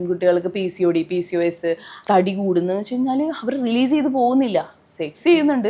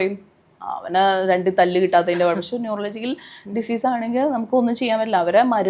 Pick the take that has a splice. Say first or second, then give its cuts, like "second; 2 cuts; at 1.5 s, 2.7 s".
first; 1 cut; at 1.9 s